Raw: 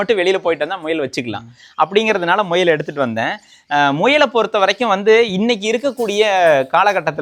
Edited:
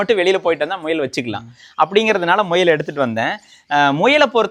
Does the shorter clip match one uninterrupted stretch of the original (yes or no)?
yes